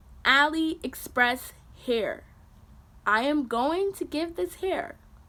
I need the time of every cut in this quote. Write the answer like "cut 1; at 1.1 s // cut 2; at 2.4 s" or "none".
none